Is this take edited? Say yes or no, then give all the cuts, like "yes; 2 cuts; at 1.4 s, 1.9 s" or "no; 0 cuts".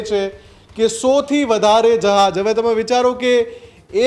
no; 0 cuts